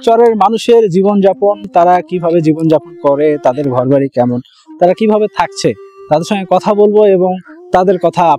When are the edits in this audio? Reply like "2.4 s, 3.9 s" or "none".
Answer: none